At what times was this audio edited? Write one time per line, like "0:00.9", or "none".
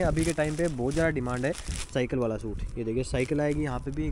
none